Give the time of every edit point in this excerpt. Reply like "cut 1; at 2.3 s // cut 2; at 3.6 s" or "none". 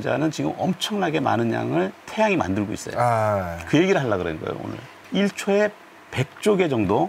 cut 1; at 5.0 s